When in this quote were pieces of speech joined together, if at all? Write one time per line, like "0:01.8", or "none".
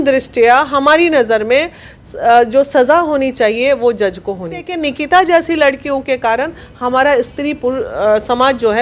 0:04.7